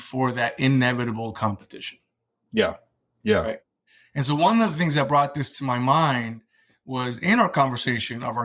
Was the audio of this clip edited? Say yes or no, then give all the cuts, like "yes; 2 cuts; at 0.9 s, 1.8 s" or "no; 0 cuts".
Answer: no; 0 cuts